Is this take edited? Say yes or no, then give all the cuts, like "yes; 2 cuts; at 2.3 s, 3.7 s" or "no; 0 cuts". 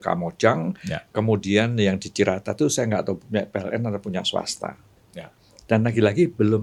no; 0 cuts